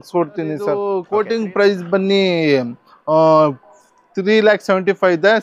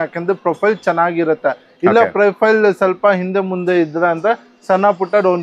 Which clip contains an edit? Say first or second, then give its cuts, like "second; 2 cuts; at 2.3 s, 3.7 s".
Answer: first; 1 cut; at 1.1 s